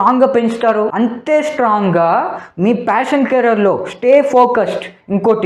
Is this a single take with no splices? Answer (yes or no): yes